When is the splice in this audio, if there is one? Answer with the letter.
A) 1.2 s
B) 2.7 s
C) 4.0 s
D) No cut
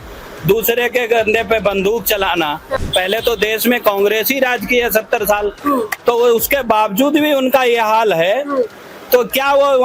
B